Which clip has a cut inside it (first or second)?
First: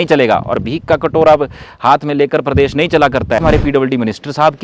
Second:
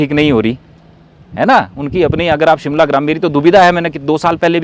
first